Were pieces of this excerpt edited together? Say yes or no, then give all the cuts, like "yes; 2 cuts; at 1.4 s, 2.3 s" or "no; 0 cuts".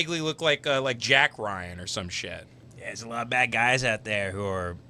yes; 1 cut; at 2.6 s